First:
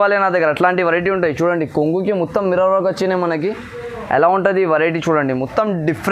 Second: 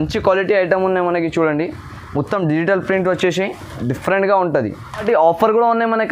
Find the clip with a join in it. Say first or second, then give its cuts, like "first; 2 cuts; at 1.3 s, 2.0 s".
second; 1 cut; at 5.0 s